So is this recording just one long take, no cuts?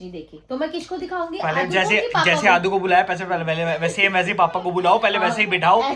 yes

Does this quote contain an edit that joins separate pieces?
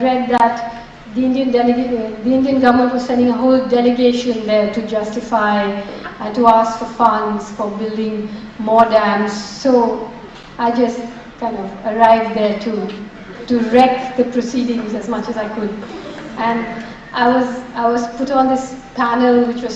yes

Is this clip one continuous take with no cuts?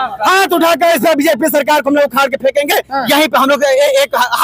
yes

